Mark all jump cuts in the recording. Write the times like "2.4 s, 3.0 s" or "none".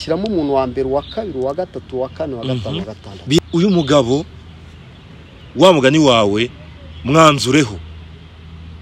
none

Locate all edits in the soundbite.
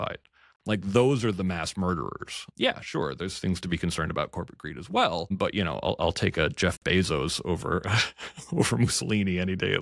2.4 s, 5.3 s

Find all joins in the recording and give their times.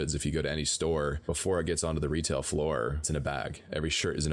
1.2 s, 3.1 s

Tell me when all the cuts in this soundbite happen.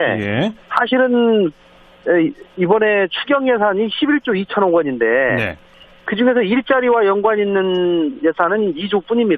1.3 s

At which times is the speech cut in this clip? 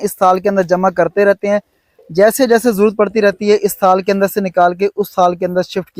none

